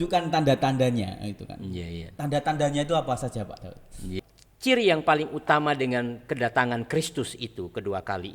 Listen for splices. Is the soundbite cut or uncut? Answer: cut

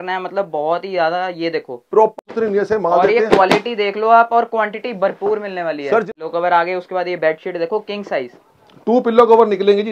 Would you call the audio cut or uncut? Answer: cut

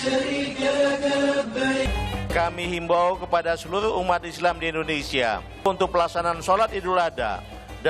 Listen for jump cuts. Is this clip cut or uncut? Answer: cut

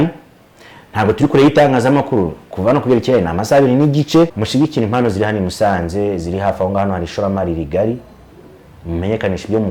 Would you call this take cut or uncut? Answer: cut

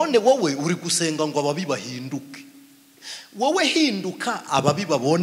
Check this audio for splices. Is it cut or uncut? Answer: uncut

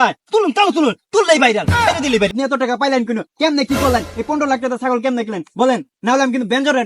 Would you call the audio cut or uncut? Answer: cut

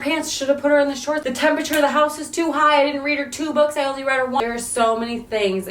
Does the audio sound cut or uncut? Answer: cut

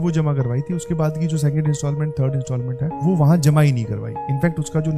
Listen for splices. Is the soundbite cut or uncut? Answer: uncut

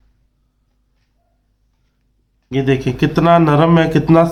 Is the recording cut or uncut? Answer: uncut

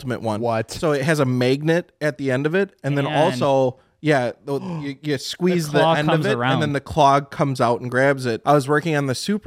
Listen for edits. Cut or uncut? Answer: cut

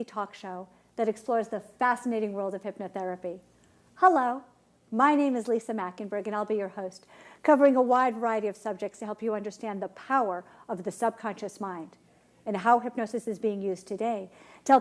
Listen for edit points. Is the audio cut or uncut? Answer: cut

